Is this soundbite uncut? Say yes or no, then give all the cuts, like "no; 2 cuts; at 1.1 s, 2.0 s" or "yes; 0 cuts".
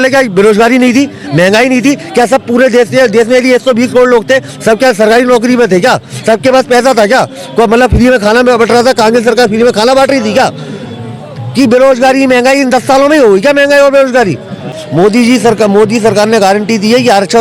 no; 1 cut; at 14.8 s